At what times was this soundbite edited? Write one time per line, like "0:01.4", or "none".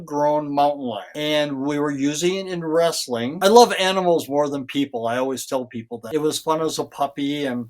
0:03.3
0:05.9

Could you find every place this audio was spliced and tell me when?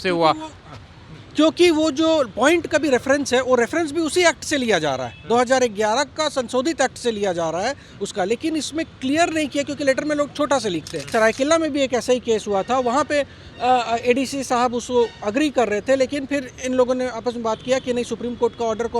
0:11.0

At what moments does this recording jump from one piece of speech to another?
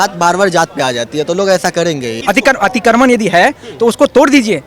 0:02.2

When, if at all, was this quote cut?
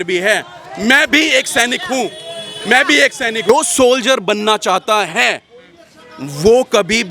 0:03.5

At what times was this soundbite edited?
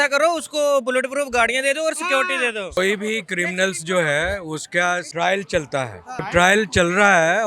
0:02.8
0:05.1
0:06.3

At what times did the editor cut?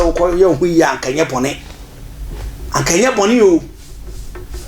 none

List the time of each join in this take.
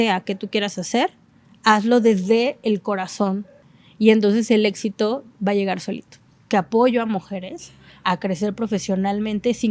0:03.6
0:06.4

